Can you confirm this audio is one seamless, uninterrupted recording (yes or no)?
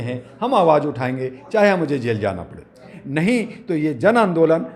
no